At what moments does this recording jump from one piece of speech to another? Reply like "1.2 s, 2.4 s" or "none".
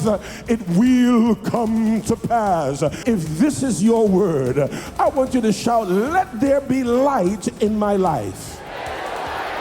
3.0 s